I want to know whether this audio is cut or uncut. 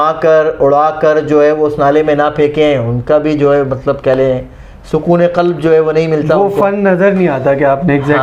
uncut